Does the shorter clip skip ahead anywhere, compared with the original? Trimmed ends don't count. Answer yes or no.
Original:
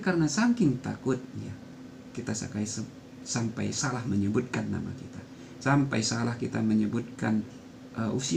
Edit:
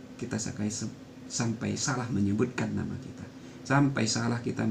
no